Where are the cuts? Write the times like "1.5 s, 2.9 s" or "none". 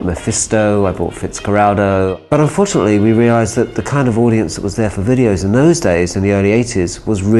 6.4 s

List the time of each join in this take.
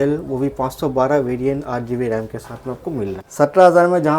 3.2 s

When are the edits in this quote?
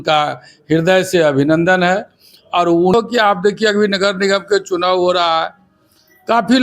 2.9 s

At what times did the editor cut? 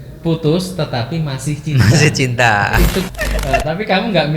3.1 s

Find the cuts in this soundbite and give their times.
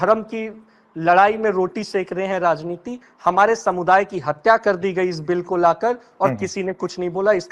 none

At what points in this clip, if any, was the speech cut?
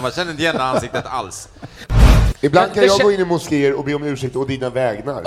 2.2 s

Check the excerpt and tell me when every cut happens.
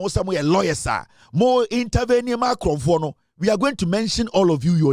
none

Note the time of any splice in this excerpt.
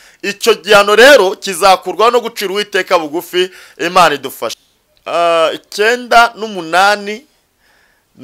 4.6 s

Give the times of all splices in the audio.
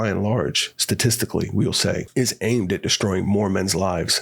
2.1 s

